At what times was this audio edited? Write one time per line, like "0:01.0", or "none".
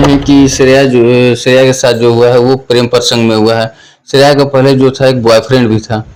none